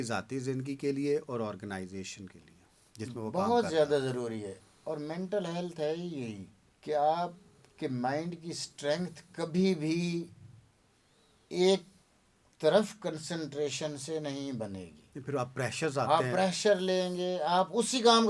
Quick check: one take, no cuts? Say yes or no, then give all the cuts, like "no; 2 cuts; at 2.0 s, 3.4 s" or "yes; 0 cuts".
yes; 0 cuts